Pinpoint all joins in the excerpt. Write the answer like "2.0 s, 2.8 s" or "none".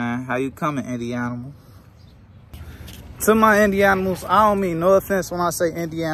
2.7 s